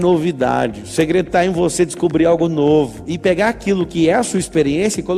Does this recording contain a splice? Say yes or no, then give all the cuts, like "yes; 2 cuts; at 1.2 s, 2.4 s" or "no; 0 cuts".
no; 0 cuts